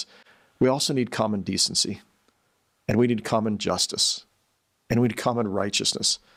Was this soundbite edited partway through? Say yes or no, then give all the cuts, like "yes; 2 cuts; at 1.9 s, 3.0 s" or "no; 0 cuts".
no; 0 cuts